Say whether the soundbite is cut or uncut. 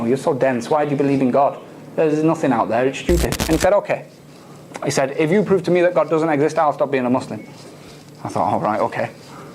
cut